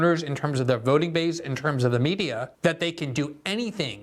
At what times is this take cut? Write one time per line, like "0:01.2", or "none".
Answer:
0:02.5

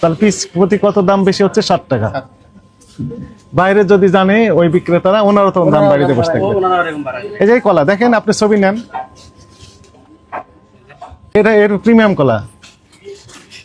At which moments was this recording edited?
0:11.4

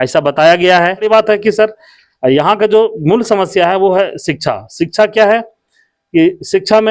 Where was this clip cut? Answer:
0:01.0

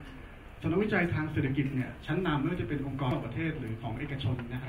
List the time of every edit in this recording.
0:03.1

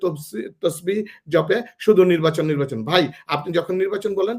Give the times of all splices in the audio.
none

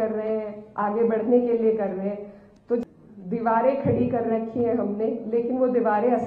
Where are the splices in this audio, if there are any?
0:02.8

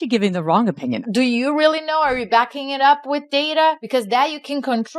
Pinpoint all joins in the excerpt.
0:01.0
0:03.8

